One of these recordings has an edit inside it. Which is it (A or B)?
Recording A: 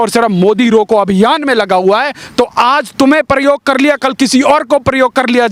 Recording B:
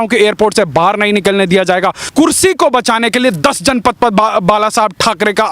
B